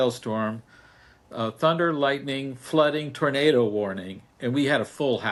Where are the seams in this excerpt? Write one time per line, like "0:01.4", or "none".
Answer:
none

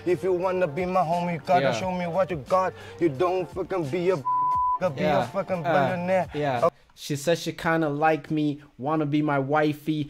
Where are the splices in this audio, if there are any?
none

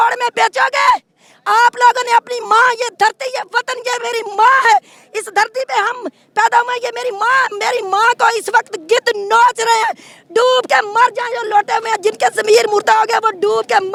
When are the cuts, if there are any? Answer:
none

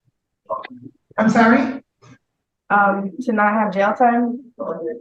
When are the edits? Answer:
none

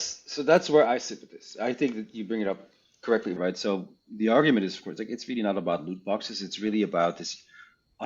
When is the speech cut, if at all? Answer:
0:03.4

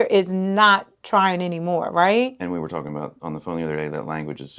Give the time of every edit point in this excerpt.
none

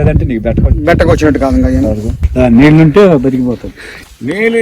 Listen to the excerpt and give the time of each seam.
0:02.2

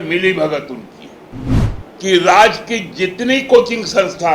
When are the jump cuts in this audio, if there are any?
0:01.7

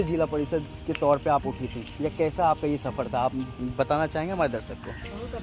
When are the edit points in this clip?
none

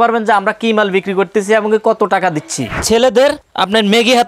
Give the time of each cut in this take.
0:02.8

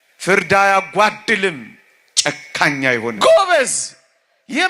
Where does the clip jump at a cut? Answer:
0:03.2

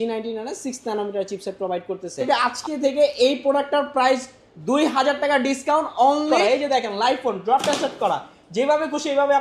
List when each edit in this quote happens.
0:02.2
0:06.3

